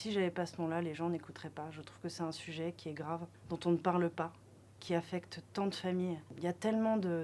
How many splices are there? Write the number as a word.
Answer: zero